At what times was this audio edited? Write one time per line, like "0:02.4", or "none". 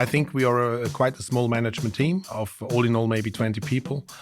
0:02.3